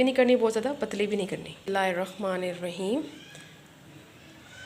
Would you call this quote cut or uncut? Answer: cut